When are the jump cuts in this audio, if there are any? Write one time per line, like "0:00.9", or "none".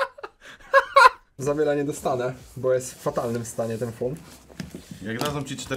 0:01.3